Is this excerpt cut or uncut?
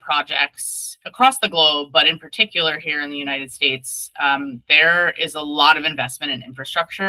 uncut